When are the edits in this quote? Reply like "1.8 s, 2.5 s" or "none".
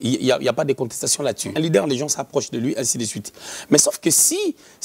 1.5 s